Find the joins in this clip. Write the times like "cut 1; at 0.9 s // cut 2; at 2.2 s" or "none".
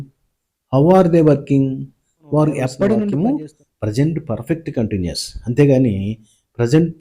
cut 1; at 3.1 s

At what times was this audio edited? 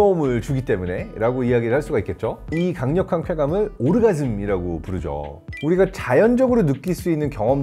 cut 1; at 2.5 s // cut 2; at 5.4 s

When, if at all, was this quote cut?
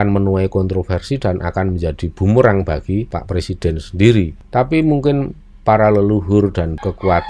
none

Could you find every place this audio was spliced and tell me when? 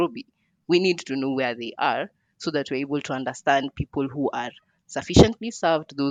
none

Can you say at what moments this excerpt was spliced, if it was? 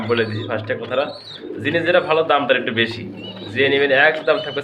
none

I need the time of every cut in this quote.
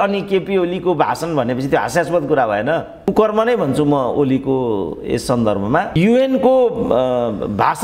cut 1; at 3.1 s

